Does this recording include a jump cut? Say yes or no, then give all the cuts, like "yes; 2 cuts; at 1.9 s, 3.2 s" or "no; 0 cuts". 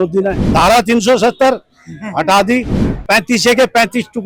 no; 0 cuts